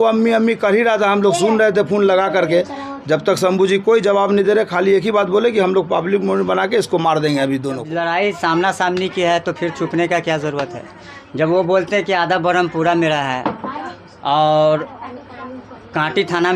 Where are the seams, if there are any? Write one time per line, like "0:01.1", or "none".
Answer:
0:07.9